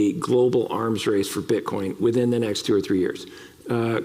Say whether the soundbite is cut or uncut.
uncut